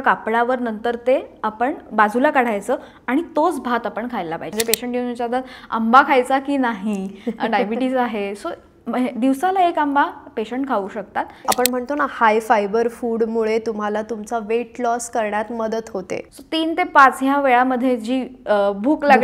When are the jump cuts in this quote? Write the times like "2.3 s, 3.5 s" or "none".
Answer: 4.5 s, 11.4 s, 16.3 s